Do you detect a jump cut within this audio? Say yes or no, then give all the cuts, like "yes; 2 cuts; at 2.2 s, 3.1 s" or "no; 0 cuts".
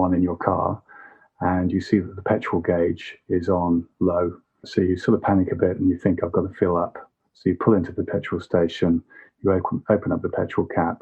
yes; 1 cut; at 4.6 s